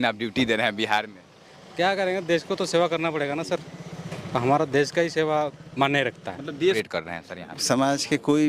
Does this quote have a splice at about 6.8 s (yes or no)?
yes